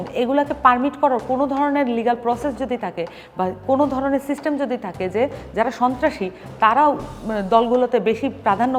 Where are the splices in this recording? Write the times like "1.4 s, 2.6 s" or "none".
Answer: none